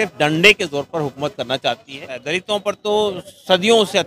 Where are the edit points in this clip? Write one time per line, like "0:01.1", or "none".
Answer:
0:02.1